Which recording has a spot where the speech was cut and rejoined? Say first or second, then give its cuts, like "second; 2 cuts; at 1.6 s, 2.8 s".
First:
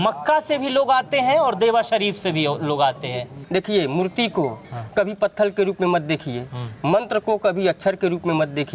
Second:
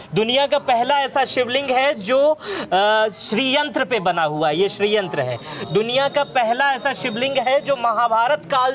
first; 1 cut; at 3.4 s